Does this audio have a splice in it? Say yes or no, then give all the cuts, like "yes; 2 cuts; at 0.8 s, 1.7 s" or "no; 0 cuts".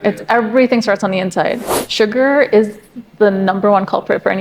yes; 1 cut; at 1.7 s